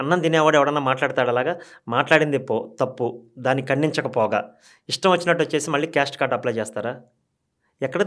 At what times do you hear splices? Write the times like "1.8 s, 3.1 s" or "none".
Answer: none